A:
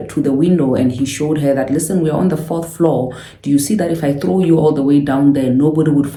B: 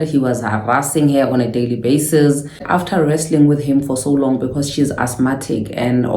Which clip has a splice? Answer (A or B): B